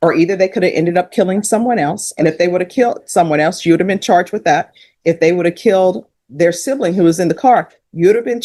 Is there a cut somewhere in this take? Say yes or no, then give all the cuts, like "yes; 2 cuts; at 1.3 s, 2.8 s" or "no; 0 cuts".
no; 0 cuts